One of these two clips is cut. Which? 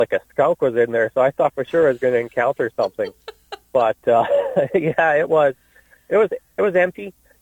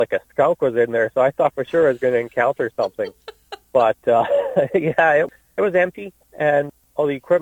second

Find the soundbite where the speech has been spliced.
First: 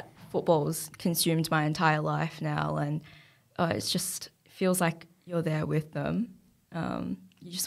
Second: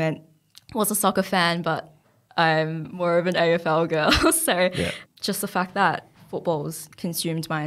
second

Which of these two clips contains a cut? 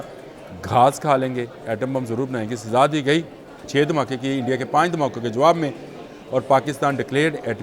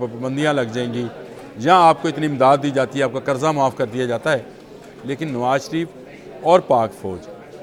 first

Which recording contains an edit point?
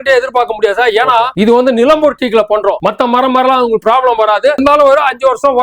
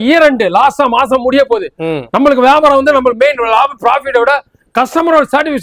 first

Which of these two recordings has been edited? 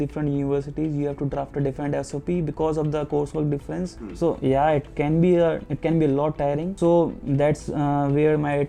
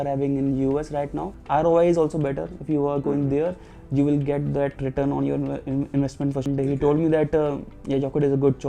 second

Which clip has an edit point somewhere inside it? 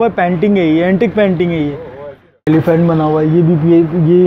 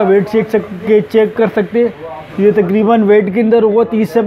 first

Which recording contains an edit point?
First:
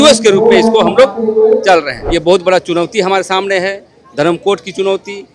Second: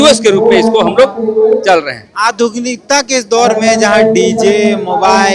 first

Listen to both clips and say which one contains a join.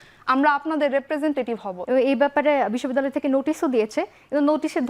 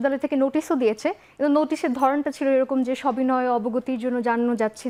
first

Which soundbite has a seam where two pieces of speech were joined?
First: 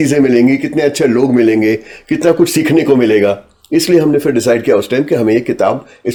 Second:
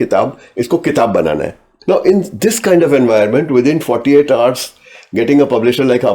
second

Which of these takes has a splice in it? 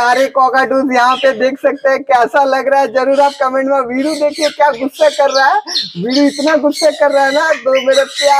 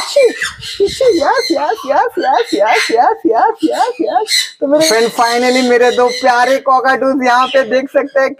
second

